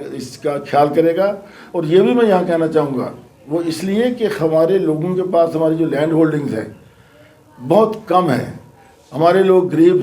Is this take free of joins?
yes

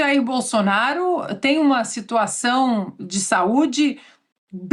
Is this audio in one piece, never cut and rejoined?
yes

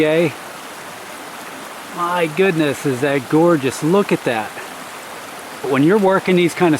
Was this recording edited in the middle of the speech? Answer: yes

